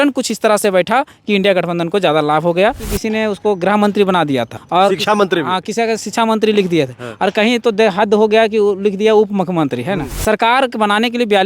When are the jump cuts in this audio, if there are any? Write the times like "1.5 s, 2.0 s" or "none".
2.9 s, 4.6 s, 10.1 s